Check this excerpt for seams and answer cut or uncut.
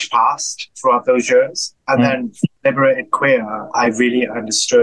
cut